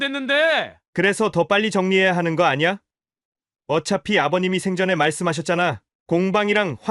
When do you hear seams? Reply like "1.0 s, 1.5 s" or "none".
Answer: none